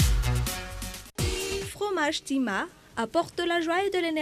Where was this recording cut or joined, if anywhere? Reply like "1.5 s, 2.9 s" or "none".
1.1 s